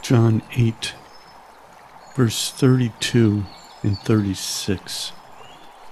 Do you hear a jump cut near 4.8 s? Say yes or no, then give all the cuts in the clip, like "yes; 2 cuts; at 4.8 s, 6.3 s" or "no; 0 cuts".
yes; 1 cut; at 4.8 s